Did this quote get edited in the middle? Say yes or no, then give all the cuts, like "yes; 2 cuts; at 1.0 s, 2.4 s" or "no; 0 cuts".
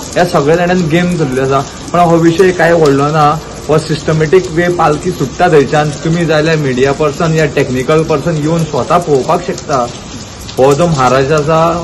no; 0 cuts